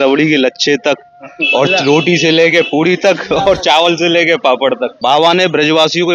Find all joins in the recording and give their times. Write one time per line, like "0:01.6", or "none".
0:04.9